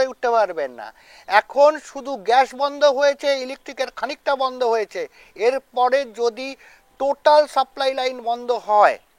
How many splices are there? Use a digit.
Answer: 0